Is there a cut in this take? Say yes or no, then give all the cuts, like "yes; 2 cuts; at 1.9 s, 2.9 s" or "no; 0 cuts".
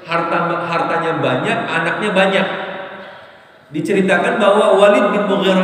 no; 0 cuts